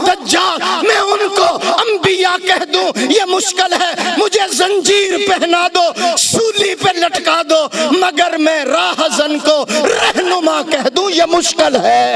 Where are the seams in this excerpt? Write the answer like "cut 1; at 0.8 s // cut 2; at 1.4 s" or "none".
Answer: none